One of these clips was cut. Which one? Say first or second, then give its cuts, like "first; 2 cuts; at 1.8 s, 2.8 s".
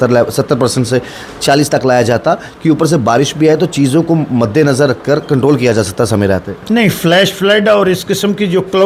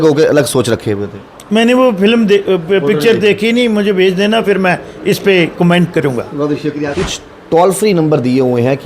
second; 1 cut; at 7.1 s